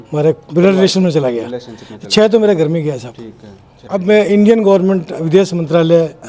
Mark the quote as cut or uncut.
cut